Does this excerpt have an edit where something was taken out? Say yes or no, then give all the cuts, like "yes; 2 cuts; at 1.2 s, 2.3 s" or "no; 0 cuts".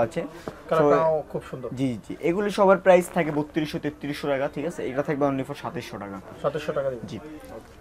no; 0 cuts